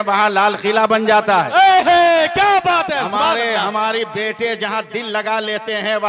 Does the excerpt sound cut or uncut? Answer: uncut